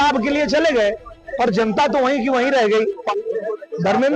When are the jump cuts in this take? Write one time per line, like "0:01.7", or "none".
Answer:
0:03.0